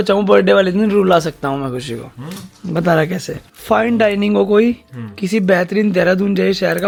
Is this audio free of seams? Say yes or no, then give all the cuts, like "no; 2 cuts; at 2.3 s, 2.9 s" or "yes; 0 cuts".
yes; 0 cuts